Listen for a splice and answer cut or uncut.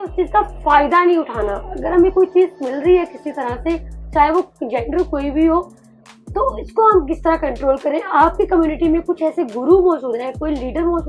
uncut